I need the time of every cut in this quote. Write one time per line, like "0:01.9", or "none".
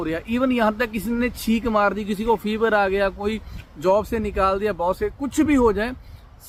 none